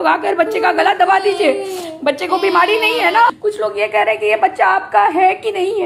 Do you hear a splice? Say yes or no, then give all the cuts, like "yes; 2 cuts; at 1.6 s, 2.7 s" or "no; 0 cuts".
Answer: yes; 1 cut; at 3.4 s